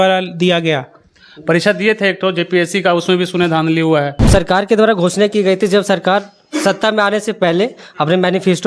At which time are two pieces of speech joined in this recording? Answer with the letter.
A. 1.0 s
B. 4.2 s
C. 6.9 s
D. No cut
B